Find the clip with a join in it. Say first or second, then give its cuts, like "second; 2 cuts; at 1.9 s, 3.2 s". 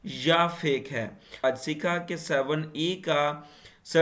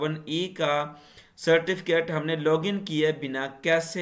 first; 1 cut; at 1.4 s